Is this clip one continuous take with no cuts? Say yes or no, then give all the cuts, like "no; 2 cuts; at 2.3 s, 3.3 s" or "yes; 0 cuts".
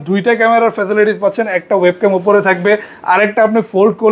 yes; 0 cuts